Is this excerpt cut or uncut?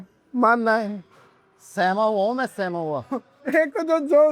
uncut